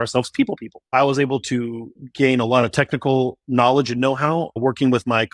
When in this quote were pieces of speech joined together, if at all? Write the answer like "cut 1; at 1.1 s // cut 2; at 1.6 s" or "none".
cut 1; at 0.9 s // cut 2; at 2.0 s // cut 3; at 4.6 s